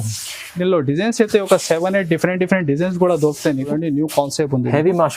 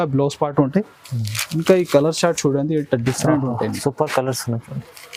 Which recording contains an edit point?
first; 1 cut; at 3.7 s

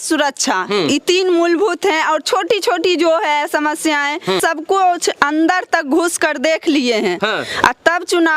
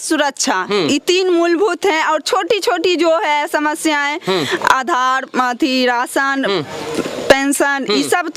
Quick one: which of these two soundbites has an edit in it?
first; 1 cut; at 4.4 s

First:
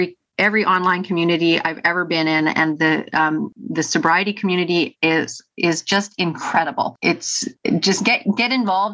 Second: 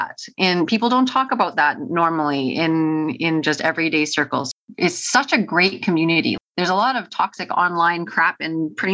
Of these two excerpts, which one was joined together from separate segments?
second; 1 cut; at 4.5 s

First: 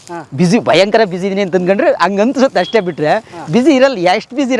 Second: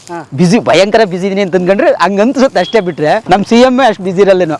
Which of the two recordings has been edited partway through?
second; 1 cut; at 3.2 s

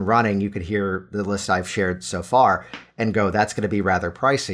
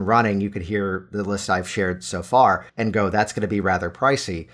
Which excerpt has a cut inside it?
second; 1 cut; at 2.7 s

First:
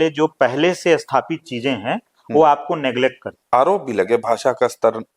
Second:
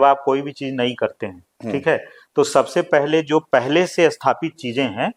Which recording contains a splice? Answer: first; 1 cut; at 3.3 s

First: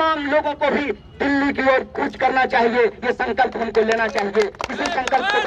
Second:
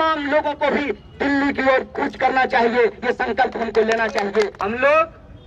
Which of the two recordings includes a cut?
second; 1 cut; at 4.6 s

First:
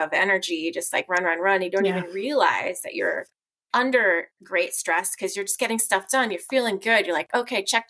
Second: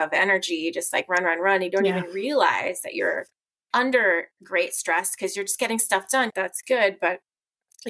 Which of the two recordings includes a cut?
second; 1 cut; at 6.3 s

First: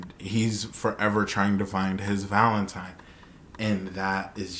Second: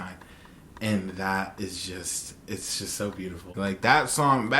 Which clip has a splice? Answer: second; 1 cut; at 3.5 s

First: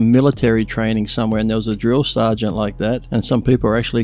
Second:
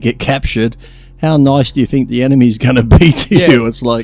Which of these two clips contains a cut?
first; 1 cut; at 3.0 s

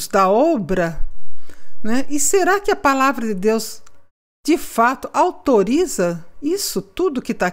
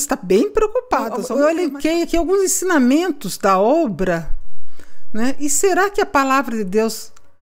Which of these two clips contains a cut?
second; 1 cut; at 1.2 s

